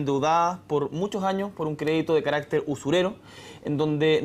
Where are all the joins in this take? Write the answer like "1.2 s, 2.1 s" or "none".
3.0 s